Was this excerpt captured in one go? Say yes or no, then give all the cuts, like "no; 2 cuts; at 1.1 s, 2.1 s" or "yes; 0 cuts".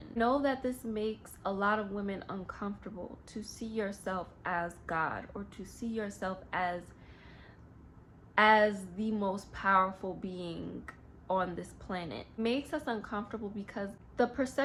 yes; 0 cuts